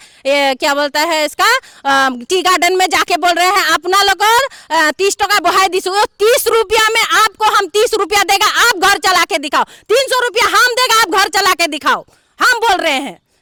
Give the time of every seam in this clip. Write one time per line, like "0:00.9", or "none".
none